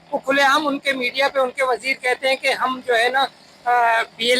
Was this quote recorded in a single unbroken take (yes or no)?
yes